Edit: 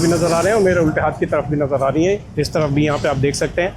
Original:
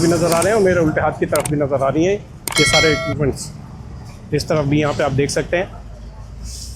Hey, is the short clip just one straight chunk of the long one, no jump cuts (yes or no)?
no